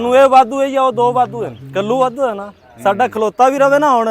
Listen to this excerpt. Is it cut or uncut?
cut